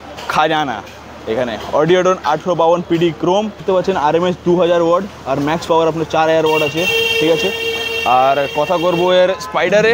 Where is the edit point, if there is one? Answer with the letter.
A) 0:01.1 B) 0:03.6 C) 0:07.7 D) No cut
B